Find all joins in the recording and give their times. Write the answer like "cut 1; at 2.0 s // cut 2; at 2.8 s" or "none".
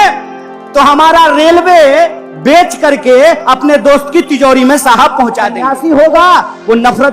cut 1; at 5.7 s